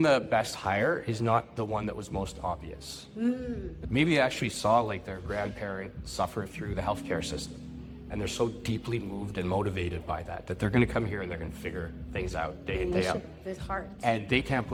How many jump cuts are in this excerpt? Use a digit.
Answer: 0